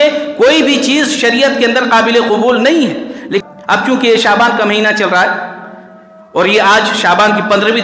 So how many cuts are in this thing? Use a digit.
1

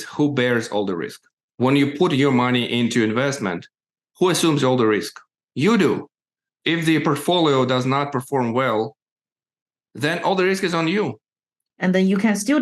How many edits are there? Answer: 2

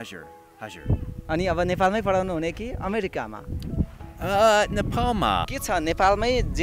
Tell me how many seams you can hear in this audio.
1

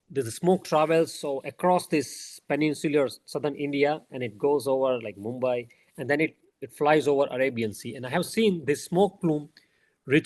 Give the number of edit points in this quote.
0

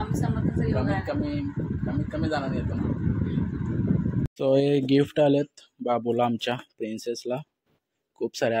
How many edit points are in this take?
1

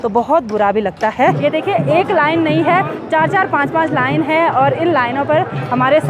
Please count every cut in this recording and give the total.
1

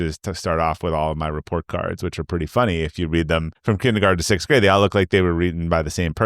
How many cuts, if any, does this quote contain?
1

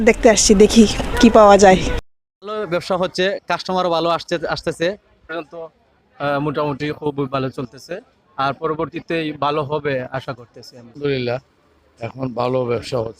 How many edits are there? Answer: 2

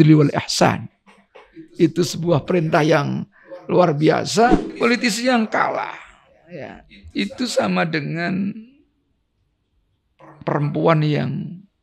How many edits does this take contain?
1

